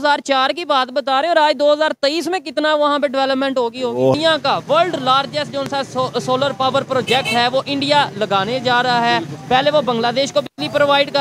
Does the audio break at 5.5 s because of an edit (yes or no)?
no